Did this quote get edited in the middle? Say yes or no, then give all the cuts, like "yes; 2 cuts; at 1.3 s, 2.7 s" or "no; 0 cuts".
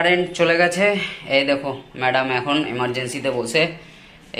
no; 0 cuts